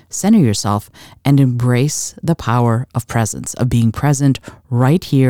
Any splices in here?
no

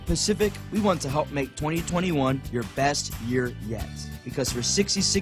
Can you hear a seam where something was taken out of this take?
no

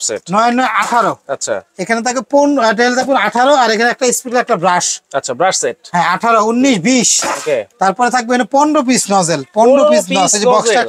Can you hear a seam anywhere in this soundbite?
no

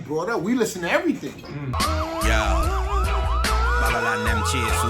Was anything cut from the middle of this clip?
yes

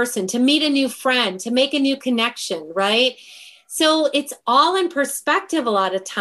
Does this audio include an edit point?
no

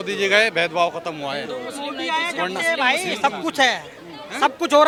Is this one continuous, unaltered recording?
yes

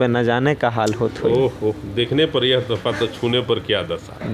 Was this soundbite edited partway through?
no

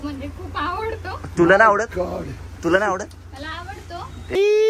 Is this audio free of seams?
yes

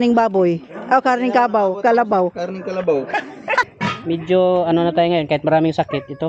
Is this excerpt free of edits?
no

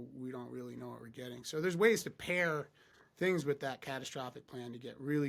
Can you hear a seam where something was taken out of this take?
no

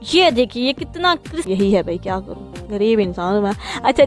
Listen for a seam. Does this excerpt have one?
yes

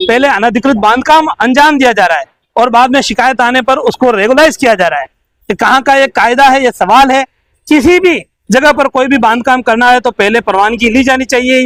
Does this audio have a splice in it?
no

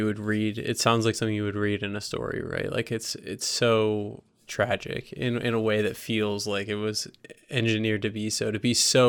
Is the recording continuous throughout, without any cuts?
yes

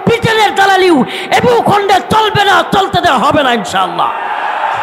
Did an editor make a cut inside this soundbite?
no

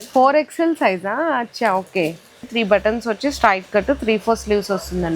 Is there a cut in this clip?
yes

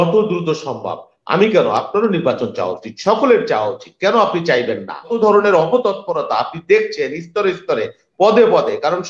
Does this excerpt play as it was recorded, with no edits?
no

